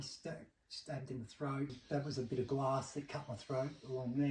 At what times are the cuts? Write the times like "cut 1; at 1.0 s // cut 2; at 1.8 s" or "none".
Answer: cut 1; at 1.8 s